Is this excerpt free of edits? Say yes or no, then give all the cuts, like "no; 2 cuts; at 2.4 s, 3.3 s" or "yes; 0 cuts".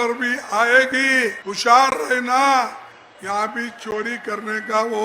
no; 1 cut; at 1.5 s